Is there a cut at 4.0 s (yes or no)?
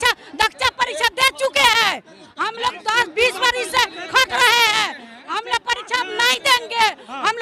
no